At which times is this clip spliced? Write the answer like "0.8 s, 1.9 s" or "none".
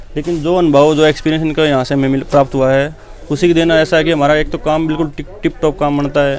none